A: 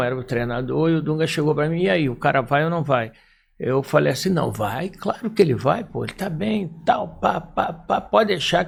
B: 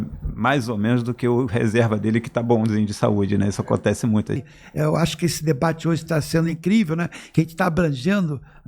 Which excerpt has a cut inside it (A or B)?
B